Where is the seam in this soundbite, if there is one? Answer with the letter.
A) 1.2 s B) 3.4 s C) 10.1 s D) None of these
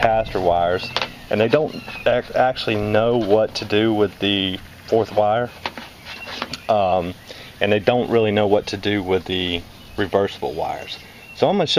D